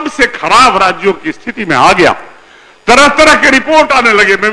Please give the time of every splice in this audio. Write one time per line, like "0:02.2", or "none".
none